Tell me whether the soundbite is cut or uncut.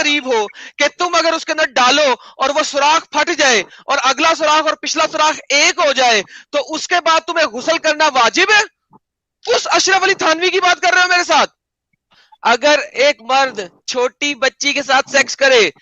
cut